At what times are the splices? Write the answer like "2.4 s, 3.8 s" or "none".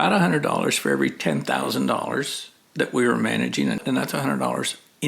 3.8 s